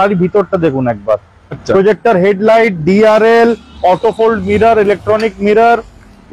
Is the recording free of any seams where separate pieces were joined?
no; 1 cut; at 1.6 s

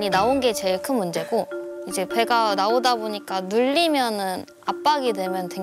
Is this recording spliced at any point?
no; 0 cuts

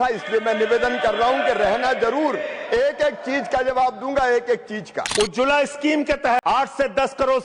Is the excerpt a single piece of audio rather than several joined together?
no; 2 cuts; at 5.0 s, 6.4 s

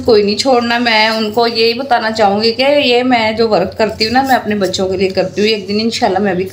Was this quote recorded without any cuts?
yes; 0 cuts

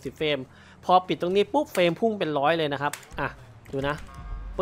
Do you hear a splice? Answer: no; 0 cuts

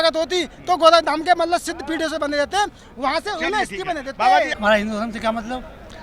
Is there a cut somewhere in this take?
yes; 1 cut; at 4.5 s

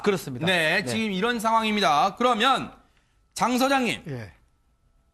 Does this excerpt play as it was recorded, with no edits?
yes; 0 cuts

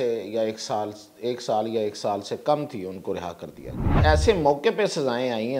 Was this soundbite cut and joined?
yes; 1 cut; at 3.9 s

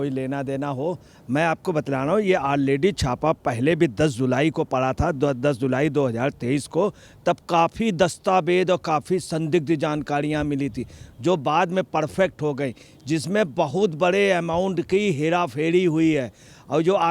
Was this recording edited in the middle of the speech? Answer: no; 0 cuts

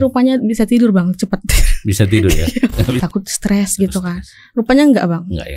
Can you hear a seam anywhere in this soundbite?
yes; 1 cut; at 3.0 s

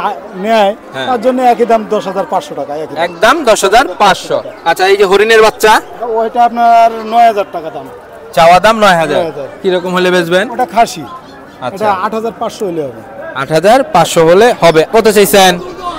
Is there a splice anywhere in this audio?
yes; 1 cut; at 14.9 s

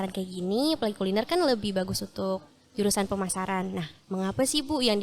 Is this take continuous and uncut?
yes; 0 cuts

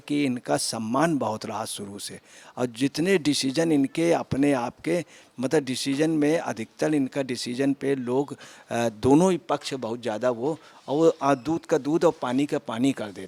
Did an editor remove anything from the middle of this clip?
no; 0 cuts

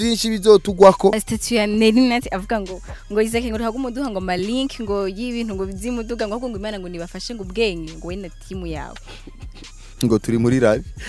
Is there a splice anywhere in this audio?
yes; 1 cut; at 1.3 s

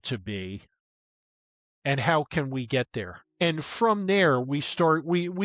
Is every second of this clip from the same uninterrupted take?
no; 1 cut; at 3.2 s

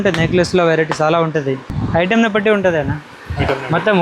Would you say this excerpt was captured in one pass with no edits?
no; 1 cut; at 1.7 s

